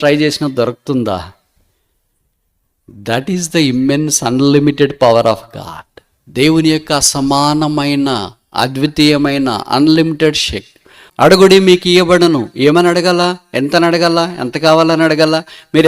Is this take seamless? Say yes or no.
no